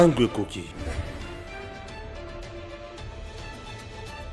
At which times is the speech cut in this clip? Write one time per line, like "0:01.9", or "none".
none